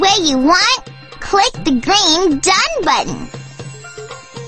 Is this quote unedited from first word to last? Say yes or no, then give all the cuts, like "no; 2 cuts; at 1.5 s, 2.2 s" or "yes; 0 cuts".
no; 1 cut; at 3.3 s